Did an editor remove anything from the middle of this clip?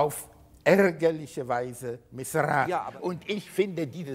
yes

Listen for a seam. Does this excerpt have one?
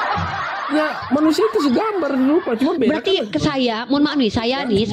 no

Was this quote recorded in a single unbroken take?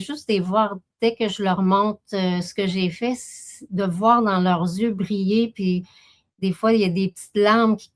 yes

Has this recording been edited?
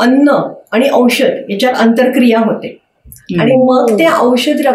no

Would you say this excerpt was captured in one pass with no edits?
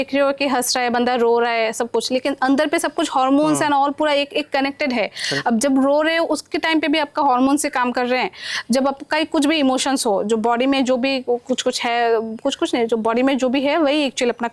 yes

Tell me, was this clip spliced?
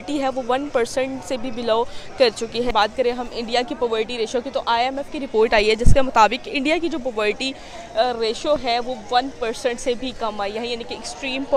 no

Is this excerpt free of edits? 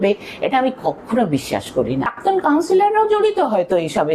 no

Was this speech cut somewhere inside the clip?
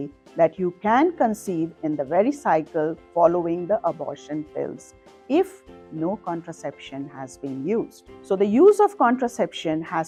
no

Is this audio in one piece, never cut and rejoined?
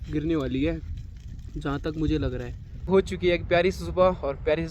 no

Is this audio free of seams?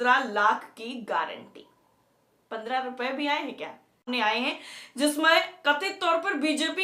no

